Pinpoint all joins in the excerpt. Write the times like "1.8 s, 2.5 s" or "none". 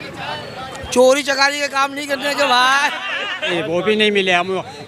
3.5 s